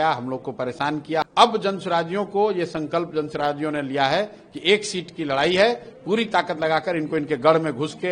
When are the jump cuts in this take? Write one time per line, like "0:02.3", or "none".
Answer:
0:01.3